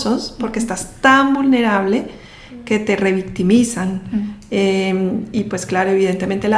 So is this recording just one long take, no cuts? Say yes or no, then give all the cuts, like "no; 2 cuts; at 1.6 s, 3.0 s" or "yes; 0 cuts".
yes; 0 cuts